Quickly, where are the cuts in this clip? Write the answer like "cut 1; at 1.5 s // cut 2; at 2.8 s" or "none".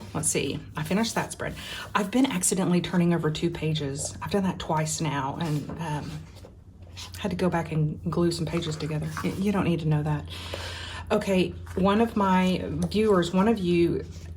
none

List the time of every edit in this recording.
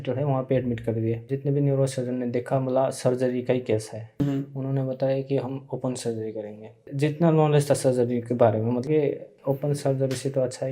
cut 1; at 1.2 s // cut 2; at 4.2 s // cut 3; at 6.9 s // cut 4; at 8.8 s

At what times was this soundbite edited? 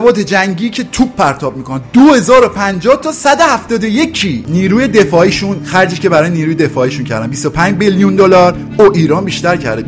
cut 1; at 4.4 s

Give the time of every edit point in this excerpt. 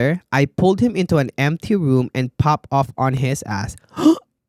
none

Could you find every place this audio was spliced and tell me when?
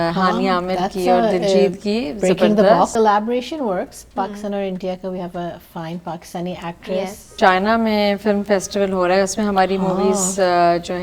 cut 1; at 2.9 s // cut 2; at 7.3 s

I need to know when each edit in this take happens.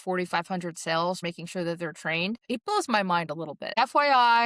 cut 1; at 1.2 s // cut 2; at 2.4 s // cut 3; at 3.6 s

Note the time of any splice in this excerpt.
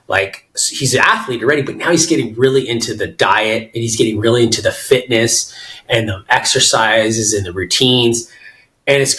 none

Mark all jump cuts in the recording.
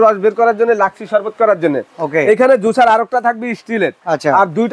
none

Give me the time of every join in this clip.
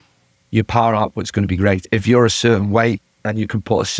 cut 1; at 1.9 s

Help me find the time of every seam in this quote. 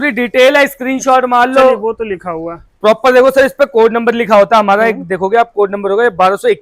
none

